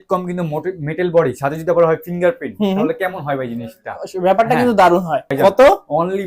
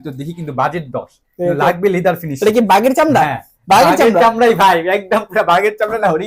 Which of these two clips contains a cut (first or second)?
first